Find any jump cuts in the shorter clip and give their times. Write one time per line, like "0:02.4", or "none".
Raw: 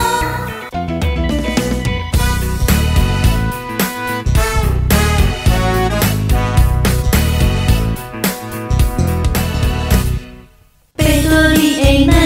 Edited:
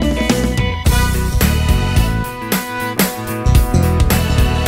0:02.9